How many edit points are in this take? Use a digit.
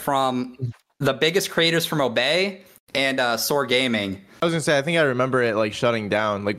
1